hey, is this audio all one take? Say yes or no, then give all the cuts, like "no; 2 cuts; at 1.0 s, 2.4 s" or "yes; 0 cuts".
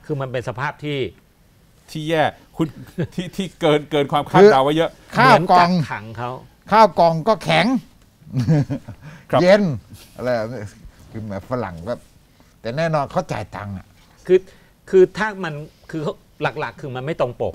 no; 1 cut; at 14.1 s